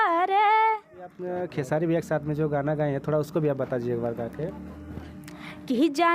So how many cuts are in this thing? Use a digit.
1